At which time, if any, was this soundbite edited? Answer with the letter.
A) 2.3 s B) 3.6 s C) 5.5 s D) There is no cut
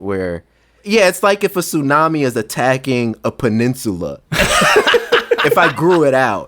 C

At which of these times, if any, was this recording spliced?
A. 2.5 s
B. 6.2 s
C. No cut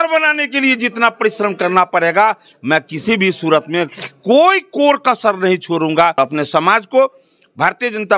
B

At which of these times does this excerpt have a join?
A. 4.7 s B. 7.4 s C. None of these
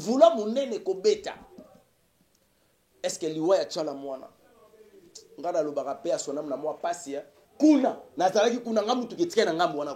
B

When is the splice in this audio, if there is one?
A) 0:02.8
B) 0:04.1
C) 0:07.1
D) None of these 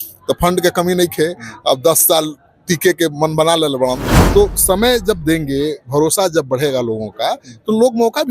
B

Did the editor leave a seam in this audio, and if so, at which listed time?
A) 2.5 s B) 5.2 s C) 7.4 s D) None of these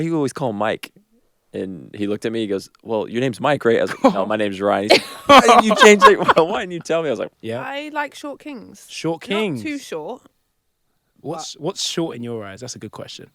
C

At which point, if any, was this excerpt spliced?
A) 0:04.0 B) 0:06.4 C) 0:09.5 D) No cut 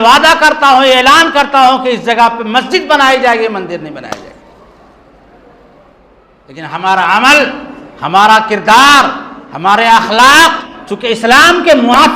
B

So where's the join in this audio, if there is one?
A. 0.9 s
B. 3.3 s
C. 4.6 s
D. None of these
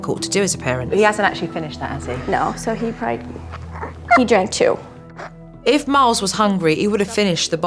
A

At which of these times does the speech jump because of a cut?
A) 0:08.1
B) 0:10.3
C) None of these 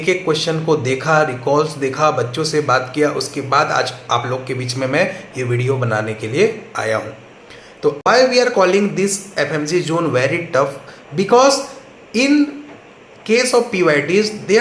A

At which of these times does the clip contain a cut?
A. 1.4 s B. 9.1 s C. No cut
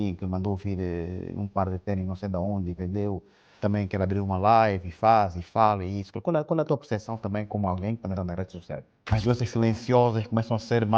B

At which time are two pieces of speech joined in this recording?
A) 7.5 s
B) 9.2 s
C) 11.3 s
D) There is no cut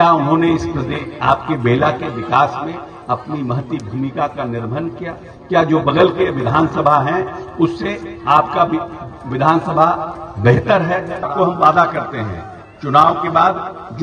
C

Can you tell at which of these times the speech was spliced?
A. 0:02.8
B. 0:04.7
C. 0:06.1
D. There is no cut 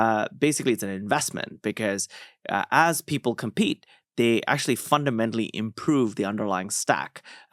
D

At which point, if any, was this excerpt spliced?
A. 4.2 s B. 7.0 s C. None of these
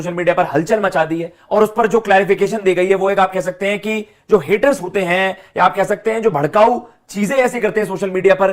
C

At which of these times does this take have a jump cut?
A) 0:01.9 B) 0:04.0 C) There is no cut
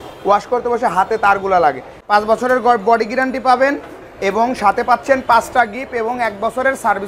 A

